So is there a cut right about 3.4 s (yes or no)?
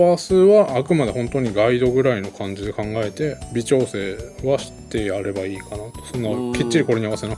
yes